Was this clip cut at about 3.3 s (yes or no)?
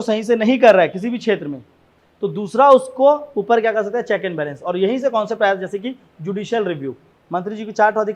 no